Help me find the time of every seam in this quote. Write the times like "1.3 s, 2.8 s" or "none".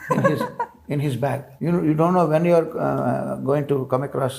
1.5 s